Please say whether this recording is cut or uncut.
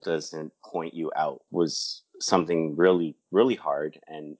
cut